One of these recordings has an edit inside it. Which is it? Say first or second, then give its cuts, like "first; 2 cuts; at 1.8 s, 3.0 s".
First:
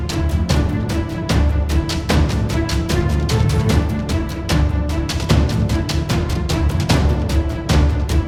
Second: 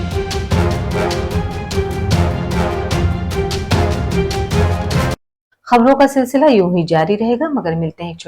second; 1 cut; at 5.1 s